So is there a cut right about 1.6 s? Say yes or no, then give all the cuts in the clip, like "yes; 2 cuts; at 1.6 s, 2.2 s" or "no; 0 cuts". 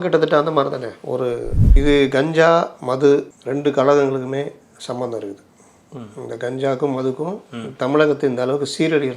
yes; 1 cut; at 1.6 s